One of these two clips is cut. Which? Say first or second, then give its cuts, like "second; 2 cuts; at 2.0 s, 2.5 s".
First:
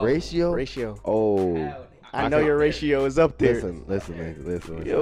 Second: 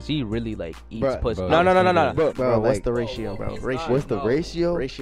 second; 1 cut; at 2.4 s